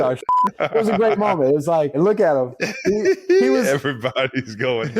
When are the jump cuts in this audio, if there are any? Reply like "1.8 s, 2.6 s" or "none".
2.0 s